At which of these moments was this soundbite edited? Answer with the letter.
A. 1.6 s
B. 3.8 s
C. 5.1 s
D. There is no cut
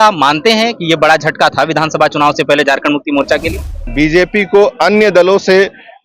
B